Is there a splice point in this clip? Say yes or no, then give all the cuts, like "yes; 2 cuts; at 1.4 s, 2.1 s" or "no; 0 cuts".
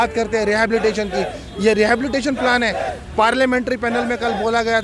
no; 0 cuts